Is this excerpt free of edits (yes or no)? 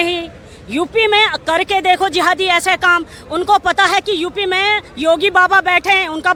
yes